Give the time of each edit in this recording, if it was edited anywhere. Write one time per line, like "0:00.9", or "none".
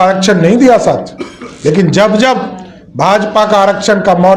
none